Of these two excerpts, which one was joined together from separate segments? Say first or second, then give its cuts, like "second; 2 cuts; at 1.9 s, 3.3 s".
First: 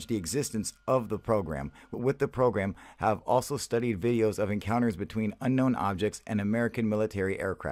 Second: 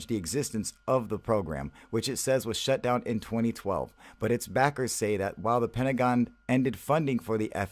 second; 1 cut; at 1.8 s